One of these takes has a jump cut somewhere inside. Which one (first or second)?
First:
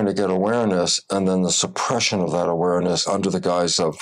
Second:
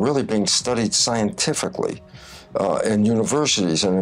first